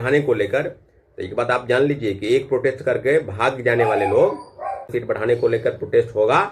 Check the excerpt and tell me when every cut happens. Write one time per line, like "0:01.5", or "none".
0:04.9